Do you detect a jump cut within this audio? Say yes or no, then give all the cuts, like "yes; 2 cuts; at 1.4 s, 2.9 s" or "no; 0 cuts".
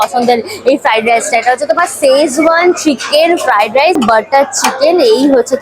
yes; 1 cut; at 4.0 s